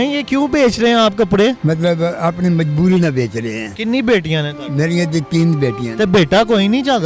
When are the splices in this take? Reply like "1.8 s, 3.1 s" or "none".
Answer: 1.6 s